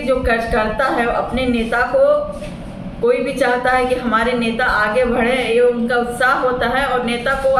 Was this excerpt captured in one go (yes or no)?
yes